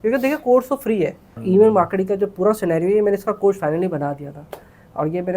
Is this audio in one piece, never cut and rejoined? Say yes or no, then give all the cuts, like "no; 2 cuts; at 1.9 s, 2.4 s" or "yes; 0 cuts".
no; 1 cut; at 1.3 s